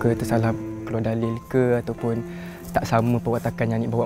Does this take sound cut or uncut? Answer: uncut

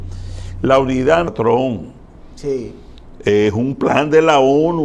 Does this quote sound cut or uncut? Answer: cut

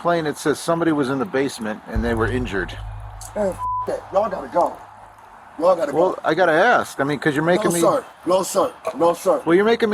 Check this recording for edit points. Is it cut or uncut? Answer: uncut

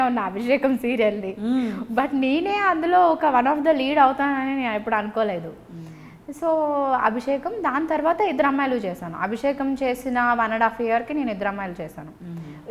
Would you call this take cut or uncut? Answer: uncut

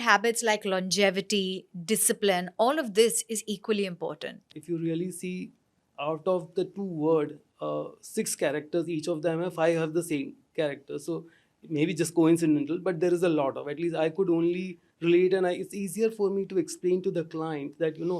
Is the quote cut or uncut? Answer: cut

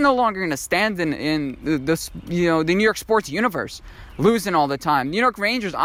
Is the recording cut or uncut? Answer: uncut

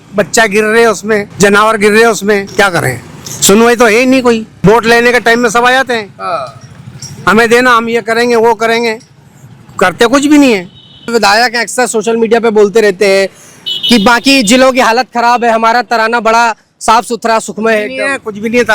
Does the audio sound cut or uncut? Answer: cut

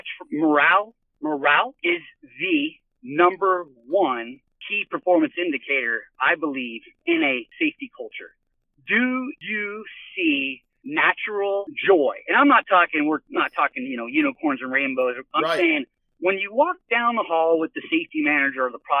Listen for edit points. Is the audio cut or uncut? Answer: cut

